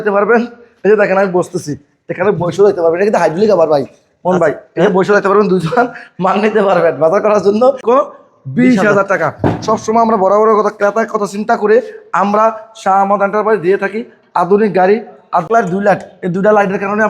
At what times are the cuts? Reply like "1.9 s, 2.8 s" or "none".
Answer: 7.8 s, 15.5 s